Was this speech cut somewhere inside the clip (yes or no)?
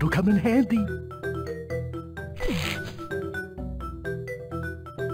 no